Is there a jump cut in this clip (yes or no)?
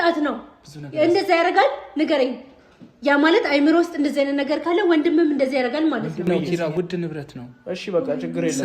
yes